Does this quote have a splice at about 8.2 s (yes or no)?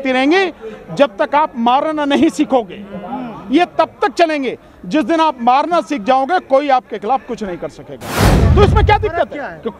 yes